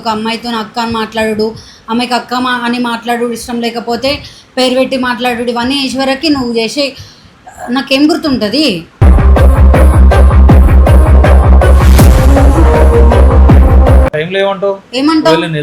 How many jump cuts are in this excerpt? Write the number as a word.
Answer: one